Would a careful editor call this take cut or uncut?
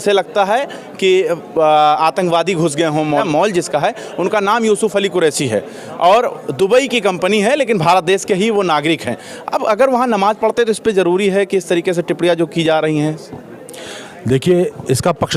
cut